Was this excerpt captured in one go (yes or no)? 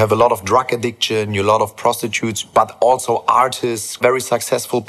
no